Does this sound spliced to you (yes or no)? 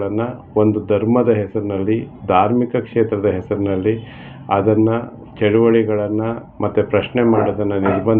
no